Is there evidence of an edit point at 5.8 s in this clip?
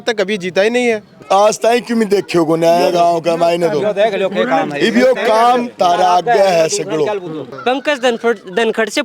no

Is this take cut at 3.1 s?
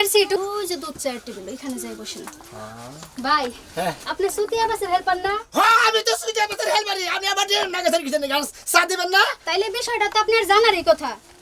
yes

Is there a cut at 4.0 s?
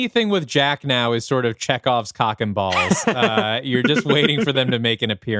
no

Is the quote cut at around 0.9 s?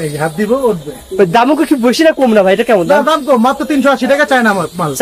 no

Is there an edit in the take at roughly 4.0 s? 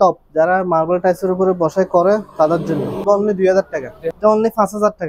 yes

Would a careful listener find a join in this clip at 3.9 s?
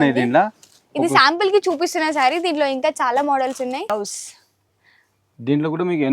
yes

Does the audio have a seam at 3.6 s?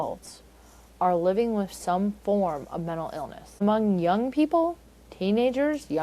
yes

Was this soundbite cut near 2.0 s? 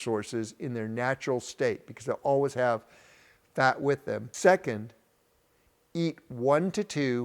no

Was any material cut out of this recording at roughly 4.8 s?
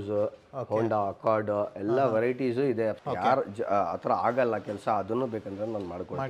no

